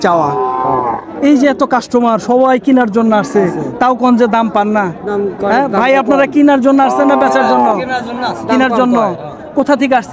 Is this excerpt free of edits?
yes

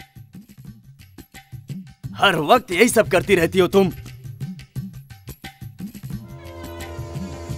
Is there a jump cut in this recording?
no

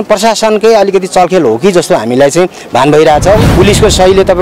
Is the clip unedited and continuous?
no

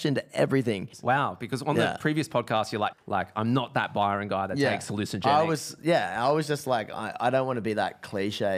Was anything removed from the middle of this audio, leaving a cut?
yes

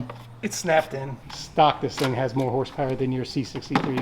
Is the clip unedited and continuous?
no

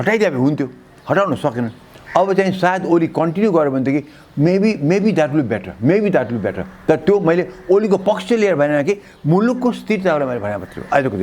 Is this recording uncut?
yes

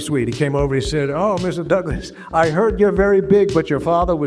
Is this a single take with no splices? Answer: yes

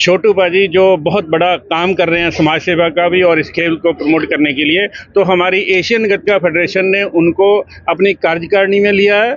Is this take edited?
no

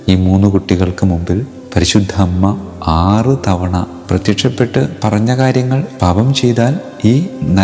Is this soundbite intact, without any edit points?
no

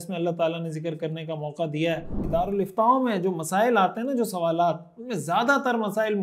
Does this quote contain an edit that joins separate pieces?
yes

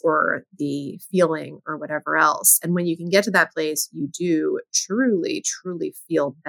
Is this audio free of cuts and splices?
yes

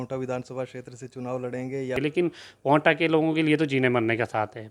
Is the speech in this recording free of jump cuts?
no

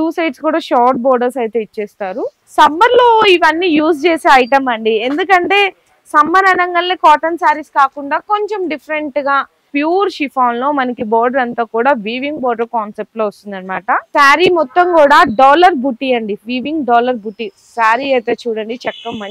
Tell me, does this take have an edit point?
yes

